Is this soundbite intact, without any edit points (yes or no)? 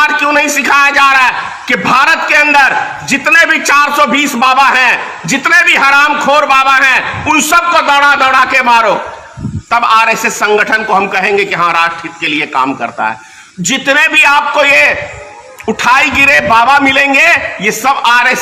yes